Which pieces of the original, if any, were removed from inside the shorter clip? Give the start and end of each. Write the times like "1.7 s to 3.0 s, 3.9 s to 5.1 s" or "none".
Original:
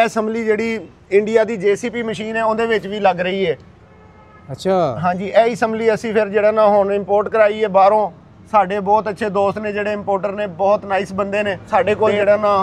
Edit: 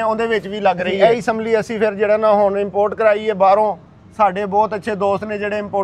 3.3 s to 5.3 s